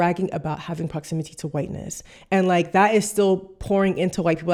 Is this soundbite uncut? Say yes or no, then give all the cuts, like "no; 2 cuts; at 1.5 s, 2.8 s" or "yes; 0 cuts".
yes; 0 cuts